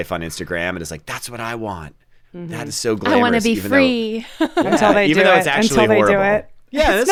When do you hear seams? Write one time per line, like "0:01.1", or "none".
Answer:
none